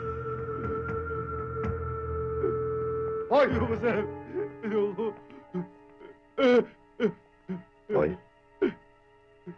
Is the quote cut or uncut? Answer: uncut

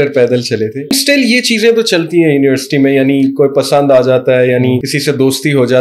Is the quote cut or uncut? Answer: cut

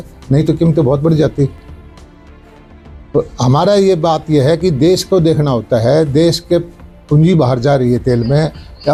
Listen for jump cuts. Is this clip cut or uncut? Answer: uncut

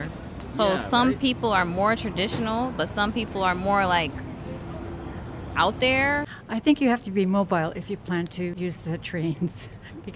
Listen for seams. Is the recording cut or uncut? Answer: cut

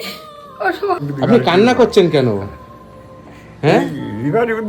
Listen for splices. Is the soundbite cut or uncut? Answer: cut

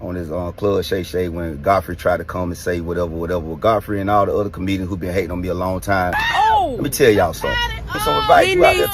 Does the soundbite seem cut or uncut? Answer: cut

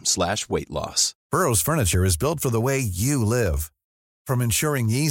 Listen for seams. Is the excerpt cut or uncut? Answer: cut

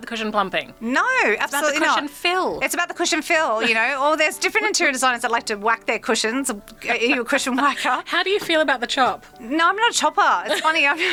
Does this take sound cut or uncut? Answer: uncut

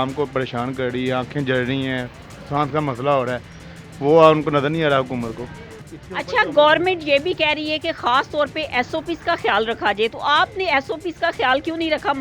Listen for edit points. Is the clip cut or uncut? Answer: uncut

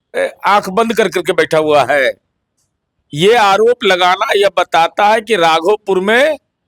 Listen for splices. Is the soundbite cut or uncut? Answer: uncut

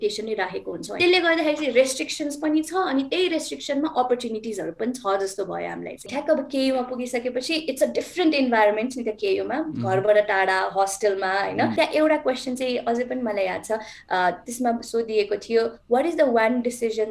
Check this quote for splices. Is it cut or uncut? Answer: cut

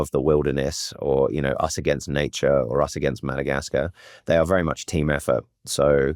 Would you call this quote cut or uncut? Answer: uncut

